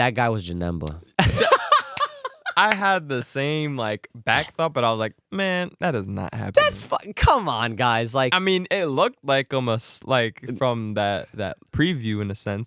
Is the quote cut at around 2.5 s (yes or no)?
no